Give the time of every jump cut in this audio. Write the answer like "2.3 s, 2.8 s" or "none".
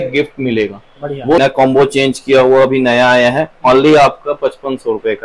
1.4 s